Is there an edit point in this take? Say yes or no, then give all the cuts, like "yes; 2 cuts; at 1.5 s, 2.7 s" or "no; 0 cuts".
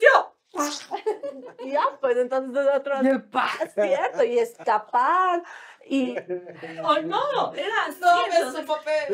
no; 0 cuts